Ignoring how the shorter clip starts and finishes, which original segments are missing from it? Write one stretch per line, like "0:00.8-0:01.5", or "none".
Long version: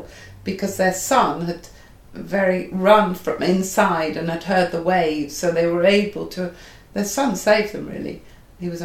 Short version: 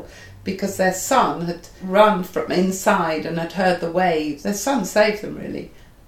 0:01.8-0:02.7
0:05.3-0:06.9